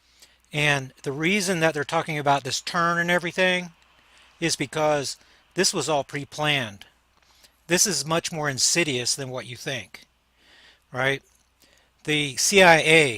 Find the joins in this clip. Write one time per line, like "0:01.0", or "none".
0:11.9